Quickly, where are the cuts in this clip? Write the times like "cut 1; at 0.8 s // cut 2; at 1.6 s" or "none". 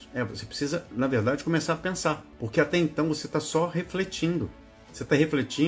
cut 1; at 2.3 s